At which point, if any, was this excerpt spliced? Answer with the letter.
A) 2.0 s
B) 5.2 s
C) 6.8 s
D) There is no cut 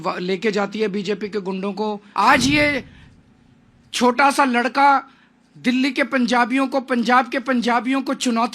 A